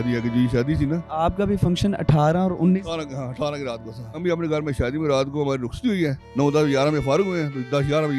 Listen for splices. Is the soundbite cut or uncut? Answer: cut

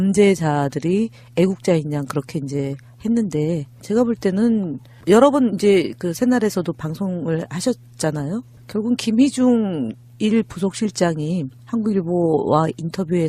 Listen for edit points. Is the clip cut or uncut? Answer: uncut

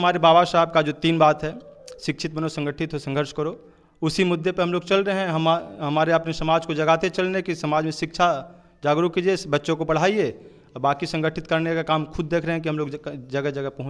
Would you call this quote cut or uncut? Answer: uncut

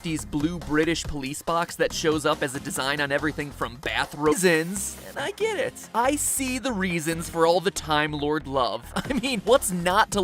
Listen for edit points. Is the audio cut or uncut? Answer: uncut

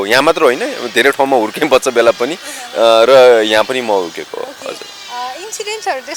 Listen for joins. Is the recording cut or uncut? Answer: uncut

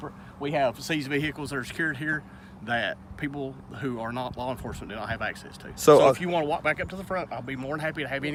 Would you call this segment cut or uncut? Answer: uncut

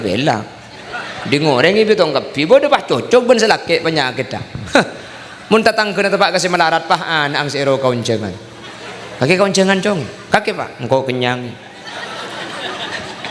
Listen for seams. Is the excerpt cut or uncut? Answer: uncut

